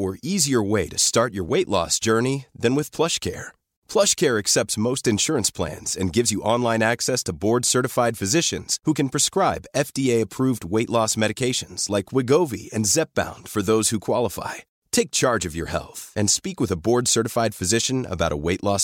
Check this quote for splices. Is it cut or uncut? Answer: uncut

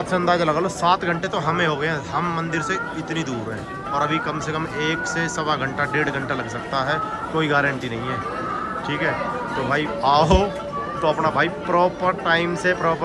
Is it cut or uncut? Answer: uncut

